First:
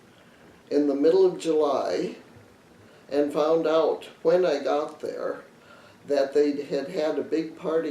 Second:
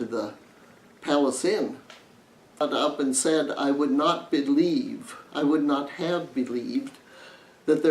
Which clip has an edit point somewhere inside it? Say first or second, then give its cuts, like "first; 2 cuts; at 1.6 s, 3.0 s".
second; 1 cut; at 2.6 s